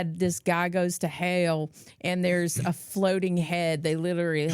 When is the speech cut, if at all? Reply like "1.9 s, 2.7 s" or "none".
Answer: none